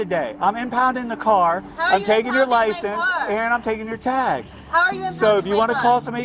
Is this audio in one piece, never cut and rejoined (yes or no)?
yes